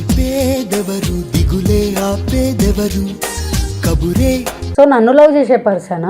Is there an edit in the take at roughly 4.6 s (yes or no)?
yes